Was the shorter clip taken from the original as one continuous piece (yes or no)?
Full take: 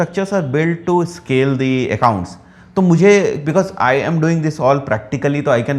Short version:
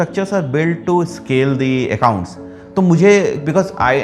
yes